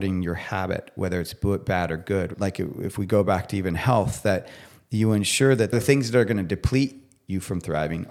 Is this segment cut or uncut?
cut